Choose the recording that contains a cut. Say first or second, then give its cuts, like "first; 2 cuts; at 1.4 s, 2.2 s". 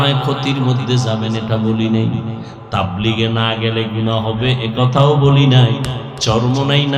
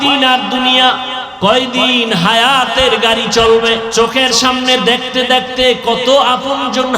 second; 2 cuts; at 1.2 s, 3.9 s